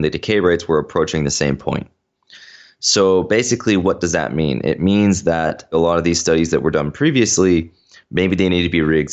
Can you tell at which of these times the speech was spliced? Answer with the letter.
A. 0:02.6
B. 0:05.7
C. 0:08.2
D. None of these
B